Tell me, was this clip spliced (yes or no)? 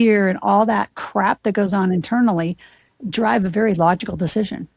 no